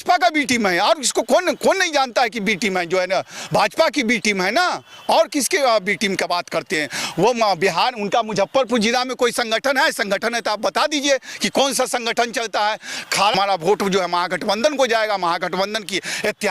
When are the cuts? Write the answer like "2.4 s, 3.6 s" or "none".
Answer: 13.3 s